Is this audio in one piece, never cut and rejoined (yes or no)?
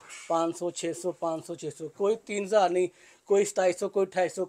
yes